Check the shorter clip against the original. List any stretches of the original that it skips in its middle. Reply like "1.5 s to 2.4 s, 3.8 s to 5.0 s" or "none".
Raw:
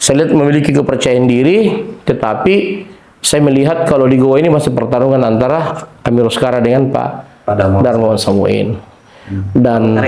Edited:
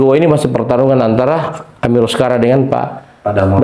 none